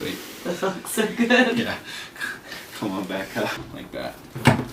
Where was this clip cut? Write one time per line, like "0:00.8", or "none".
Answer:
0:03.7